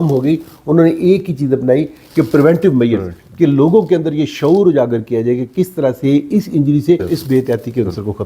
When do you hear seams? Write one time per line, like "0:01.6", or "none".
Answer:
0:07.0